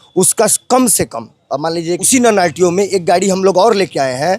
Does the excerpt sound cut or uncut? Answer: cut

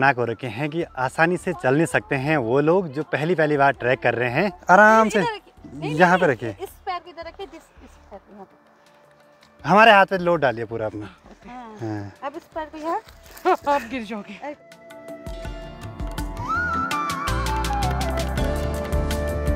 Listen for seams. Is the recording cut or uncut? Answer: uncut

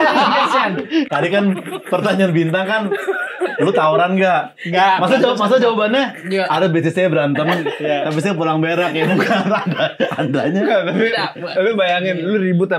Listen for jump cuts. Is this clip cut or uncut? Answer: cut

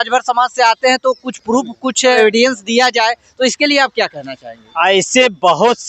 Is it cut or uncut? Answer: cut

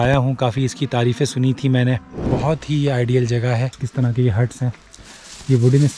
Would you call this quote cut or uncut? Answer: cut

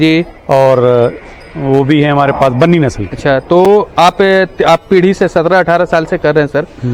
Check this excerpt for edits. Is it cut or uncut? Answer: uncut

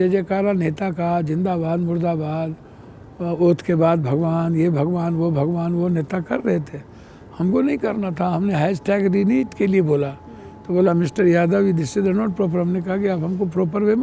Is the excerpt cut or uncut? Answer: uncut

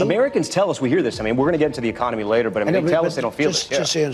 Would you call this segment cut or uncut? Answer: uncut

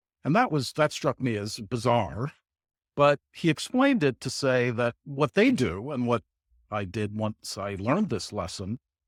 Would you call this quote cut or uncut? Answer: uncut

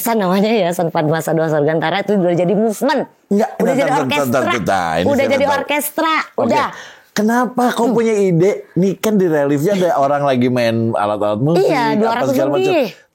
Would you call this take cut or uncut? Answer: uncut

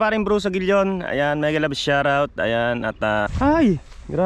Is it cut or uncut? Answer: cut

